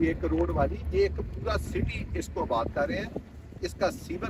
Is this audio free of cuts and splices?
yes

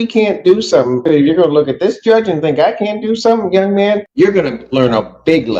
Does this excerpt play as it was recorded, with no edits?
no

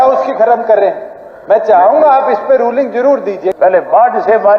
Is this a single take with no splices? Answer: no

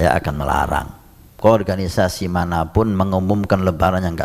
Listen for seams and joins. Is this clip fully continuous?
no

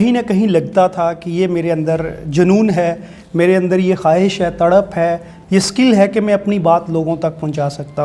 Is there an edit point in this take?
no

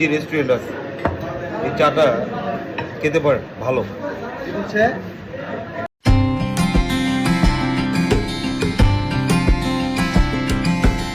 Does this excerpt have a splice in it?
no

